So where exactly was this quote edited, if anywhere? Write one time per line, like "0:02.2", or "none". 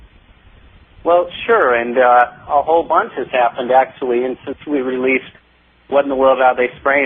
0:01.9

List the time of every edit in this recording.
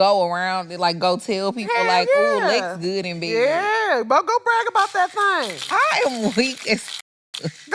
none

